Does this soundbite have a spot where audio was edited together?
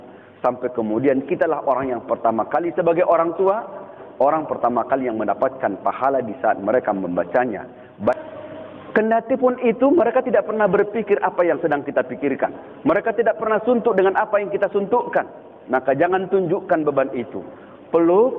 yes; 1 cut; at 8.1 s

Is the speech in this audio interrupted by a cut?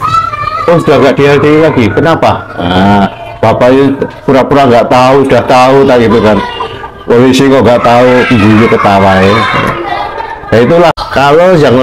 yes; 1 cut; at 10.9 s

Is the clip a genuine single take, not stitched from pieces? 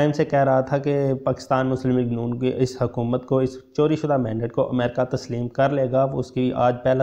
yes; 0 cuts

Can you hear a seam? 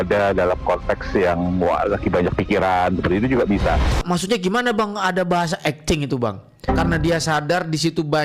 yes; 1 cut; at 4.0 s

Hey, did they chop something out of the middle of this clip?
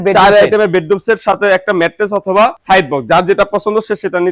yes; 1 cut; at 2.6 s

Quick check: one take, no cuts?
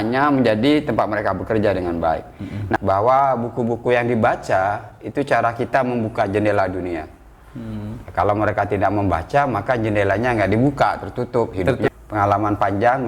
no; 2 cuts; at 2.8 s, 11.9 s

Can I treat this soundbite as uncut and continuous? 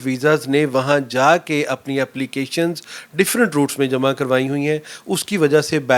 yes; 0 cuts

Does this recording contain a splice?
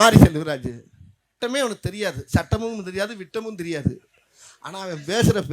yes; 1 cut; at 1.4 s

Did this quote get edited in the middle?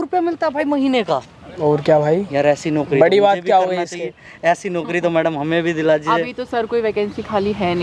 no; 0 cuts

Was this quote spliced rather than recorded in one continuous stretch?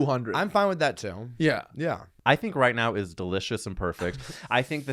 yes; 1 cut; at 2.1 s

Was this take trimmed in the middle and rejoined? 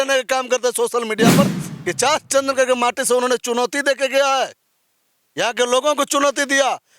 yes; 1 cut; at 1.6 s

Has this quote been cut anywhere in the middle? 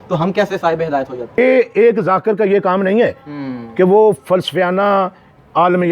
yes; 1 cut; at 1.4 s

